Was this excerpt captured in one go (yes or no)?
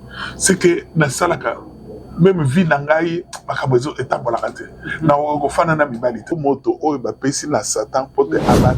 no